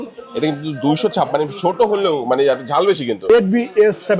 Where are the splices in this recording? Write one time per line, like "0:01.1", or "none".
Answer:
0:03.3